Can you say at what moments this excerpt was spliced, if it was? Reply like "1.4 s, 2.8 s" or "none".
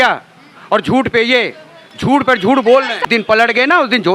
3.1 s